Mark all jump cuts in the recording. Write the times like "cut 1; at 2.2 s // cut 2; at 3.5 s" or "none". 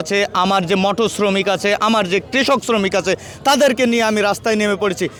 none